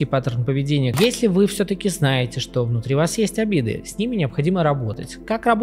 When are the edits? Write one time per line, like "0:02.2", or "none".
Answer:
0:00.9